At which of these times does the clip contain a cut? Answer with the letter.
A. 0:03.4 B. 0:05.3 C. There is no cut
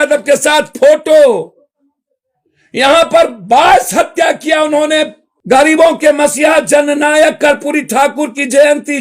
B